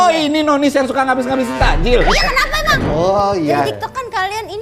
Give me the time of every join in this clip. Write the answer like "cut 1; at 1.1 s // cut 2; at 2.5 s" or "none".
cut 1; at 2.7 s